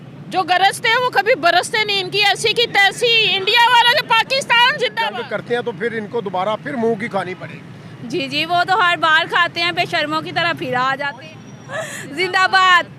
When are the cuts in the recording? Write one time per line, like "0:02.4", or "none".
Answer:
0:05.1
0:11.1